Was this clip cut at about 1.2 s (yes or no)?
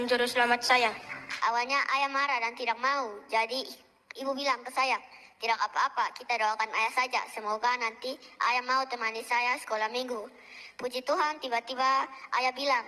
yes